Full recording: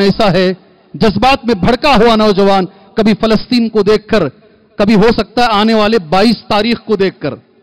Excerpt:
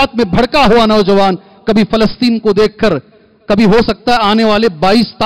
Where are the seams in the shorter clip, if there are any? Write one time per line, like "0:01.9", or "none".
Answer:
none